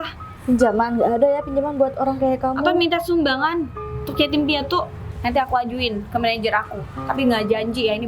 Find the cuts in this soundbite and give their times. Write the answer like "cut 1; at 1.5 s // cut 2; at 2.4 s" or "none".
cut 1; at 5.0 s

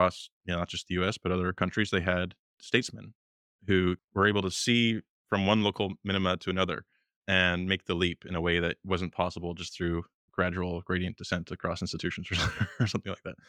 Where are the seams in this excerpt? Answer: cut 1; at 1.6 s // cut 2; at 2.6 s // cut 3; at 4.0 s // cut 4; at 5.1 s

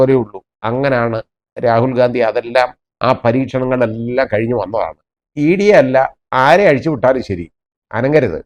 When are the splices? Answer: cut 1; at 5.2 s

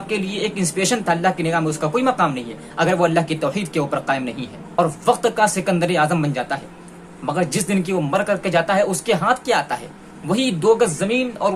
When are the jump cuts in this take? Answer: cut 1; at 4.6 s

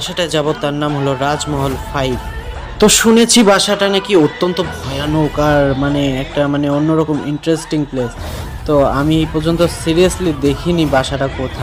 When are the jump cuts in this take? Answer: none

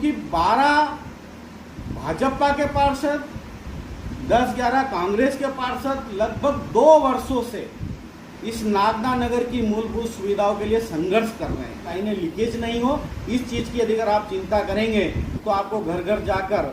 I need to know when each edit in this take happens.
cut 1; at 11.9 s

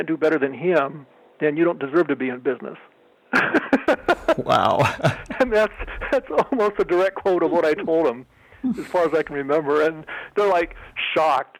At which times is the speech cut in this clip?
none

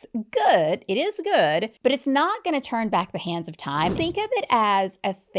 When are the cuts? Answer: cut 1; at 1.7 s // cut 2; at 4.0 s

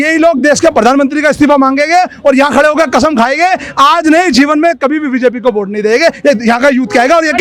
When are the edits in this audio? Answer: none

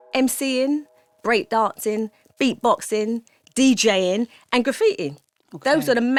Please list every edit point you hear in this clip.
none

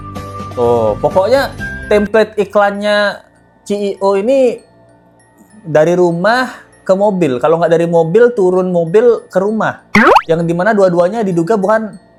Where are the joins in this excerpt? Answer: none

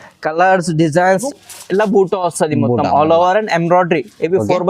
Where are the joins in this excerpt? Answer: cut 1; at 1.2 s

